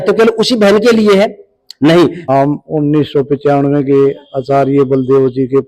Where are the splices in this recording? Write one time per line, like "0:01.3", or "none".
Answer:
0:02.2